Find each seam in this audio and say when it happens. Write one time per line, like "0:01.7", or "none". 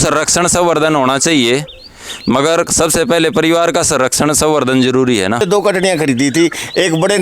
0:05.4